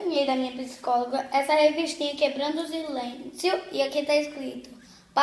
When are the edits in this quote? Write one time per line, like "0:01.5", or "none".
none

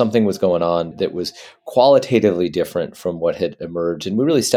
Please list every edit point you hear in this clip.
0:00.9

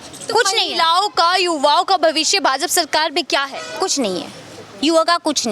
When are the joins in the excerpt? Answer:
none

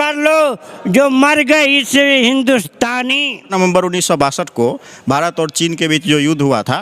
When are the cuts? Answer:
0:03.5

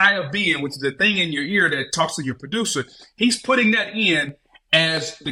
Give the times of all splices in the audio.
none

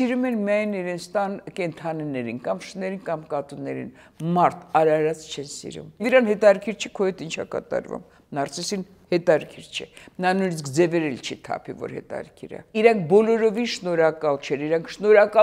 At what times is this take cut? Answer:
0:06.0
0:12.5

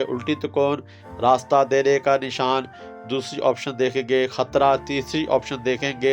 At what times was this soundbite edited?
none

